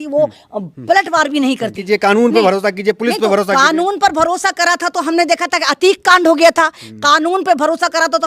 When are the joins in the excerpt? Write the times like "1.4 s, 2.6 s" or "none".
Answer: 1.8 s